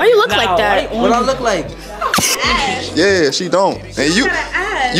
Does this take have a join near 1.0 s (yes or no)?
no